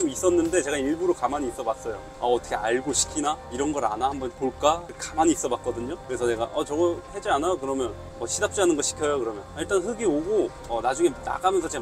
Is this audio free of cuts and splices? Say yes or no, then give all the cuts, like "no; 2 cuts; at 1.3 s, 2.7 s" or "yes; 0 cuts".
yes; 0 cuts